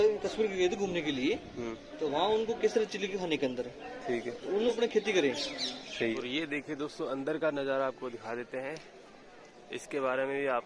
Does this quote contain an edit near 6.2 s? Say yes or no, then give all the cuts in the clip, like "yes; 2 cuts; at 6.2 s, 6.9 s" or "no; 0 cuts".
yes; 2 cuts; at 4.7 s, 6.2 s